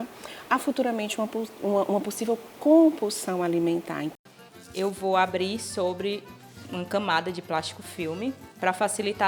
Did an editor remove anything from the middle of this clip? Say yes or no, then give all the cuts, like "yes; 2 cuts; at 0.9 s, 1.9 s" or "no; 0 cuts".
yes; 1 cut; at 4.1 s